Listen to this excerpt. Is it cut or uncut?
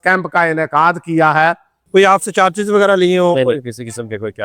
cut